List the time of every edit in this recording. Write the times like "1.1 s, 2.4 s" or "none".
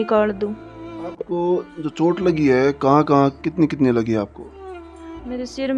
1.1 s